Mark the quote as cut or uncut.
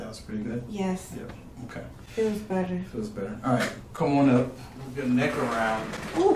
uncut